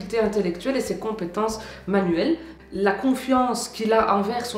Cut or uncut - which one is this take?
cut